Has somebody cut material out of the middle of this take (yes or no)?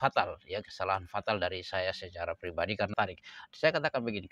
yes